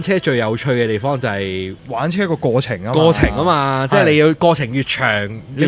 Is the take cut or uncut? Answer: cut